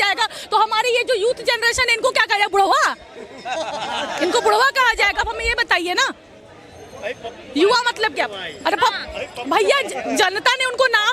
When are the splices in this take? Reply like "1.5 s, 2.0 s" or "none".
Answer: none